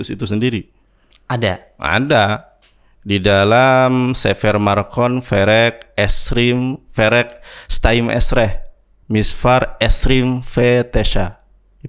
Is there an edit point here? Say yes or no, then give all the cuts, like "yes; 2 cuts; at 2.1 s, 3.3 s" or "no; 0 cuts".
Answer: no; 0 cuts